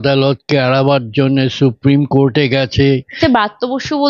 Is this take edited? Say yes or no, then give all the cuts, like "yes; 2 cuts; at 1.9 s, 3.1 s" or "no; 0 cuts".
yes; 1 cut; at 3.2 s